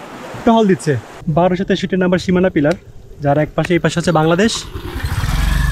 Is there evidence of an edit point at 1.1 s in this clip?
yes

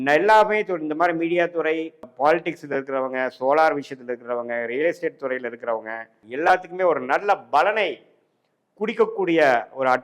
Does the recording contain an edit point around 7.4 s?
no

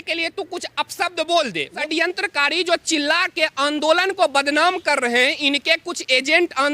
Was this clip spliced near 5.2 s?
no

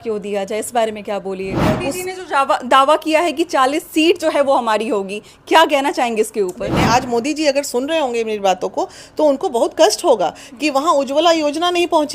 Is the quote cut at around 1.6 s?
yes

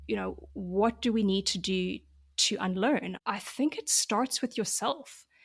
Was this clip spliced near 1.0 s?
no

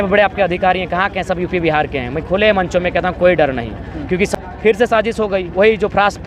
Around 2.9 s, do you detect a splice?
no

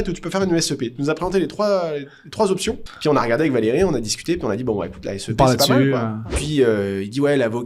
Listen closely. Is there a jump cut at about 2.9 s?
yes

